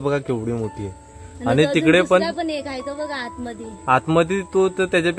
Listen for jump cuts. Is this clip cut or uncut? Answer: uncut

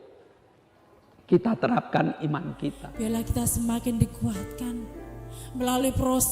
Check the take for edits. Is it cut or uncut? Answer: cut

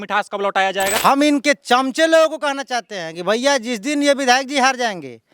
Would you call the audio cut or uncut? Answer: cut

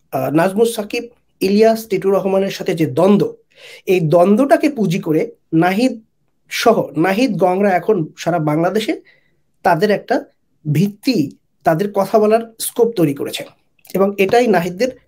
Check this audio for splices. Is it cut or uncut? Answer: uncut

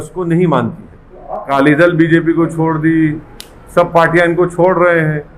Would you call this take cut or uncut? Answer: cut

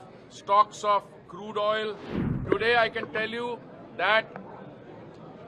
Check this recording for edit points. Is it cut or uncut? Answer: cut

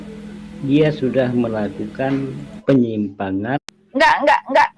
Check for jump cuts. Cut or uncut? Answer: cut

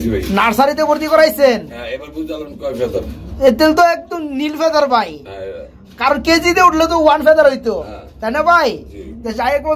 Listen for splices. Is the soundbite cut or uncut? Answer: uncut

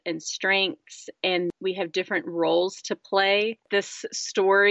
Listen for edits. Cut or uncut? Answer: cut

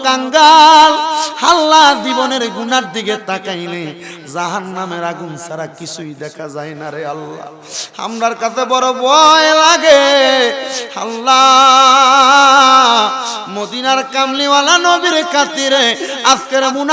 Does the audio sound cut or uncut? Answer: uncut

